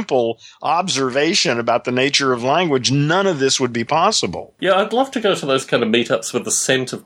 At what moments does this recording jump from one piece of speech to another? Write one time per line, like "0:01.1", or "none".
0:04.5